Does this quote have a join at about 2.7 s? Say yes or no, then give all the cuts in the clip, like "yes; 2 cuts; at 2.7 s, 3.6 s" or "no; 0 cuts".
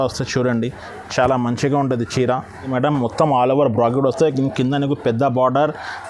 yes; 1 cut; at 2.7 s